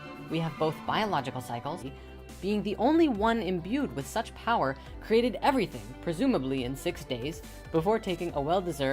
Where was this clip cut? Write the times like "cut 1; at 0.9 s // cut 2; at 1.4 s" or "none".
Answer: none